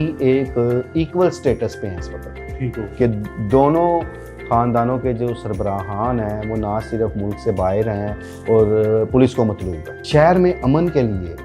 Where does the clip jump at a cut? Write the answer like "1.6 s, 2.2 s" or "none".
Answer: 10.0 s